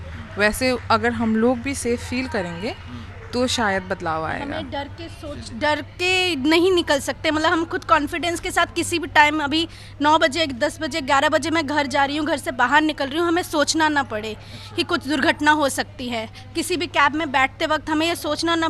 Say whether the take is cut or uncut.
uncut